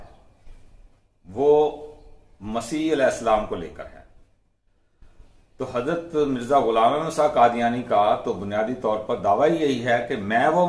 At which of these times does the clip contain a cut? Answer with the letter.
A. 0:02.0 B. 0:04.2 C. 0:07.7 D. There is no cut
B